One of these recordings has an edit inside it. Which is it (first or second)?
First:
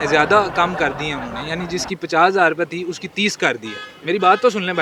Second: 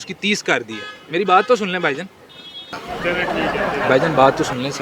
second